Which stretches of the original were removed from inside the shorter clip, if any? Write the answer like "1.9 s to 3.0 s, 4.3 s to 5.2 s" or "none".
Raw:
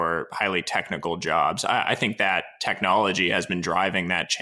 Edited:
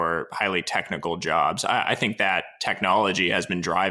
none

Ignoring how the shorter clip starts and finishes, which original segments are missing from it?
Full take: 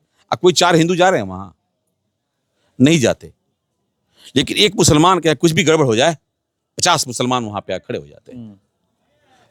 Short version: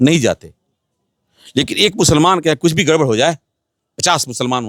none

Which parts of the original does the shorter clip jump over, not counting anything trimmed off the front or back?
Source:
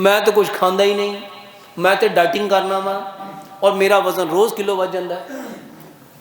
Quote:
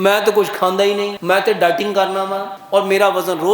1.1 s to 1.7 s, 3.1 s to 3.4 s

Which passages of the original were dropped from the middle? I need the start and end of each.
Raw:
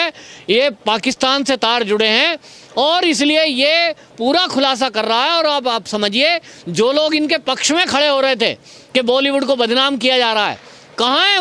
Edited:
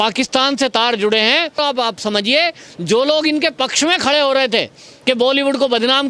2.5 s to 5.5 s

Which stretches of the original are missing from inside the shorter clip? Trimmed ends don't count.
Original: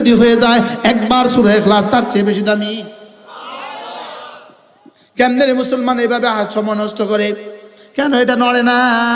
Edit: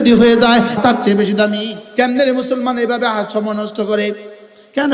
0.8 s to 1.9 s, 2.9 s to 5.0 s

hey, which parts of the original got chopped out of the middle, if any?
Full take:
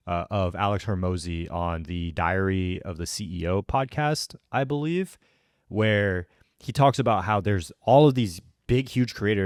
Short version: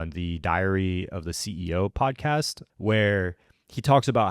4.3 s to 5.5 s

